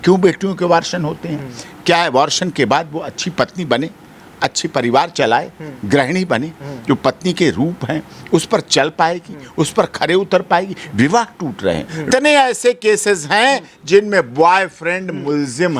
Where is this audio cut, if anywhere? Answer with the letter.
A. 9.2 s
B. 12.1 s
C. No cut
B